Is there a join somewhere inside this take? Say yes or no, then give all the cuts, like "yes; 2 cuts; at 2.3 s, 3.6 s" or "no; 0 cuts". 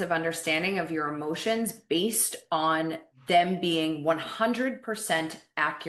yes; 1 cut; at 3.1 s